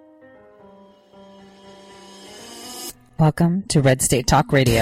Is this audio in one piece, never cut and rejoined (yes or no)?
yes